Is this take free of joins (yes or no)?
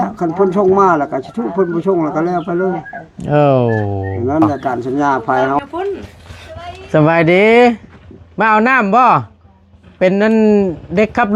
no